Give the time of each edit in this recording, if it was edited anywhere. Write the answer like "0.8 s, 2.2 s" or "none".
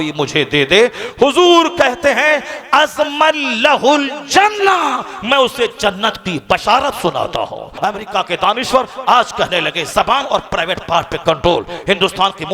7.7 s